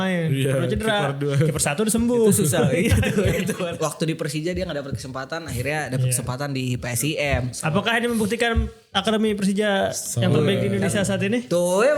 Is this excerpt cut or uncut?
cut